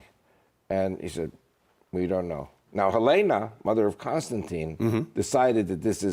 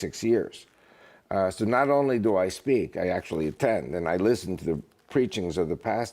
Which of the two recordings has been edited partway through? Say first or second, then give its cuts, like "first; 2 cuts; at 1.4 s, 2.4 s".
second; 1 cut; at 3.6 s